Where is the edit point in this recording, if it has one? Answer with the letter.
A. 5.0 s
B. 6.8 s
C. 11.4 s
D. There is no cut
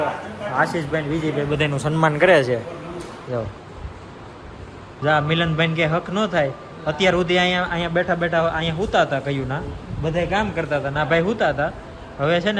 A